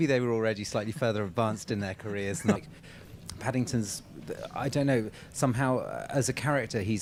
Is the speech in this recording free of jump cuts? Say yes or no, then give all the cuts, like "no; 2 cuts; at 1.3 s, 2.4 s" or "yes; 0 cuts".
yes; 0 cuts